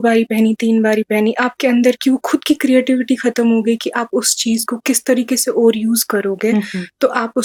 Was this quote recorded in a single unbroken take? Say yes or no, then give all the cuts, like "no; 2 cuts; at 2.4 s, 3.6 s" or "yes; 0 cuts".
yes; 0 cuts